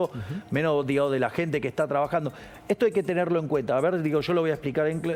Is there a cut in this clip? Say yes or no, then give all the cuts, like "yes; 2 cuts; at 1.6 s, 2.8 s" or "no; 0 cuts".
no; 0 cuts